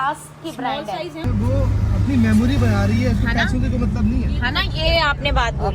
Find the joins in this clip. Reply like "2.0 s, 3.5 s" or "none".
1.3 s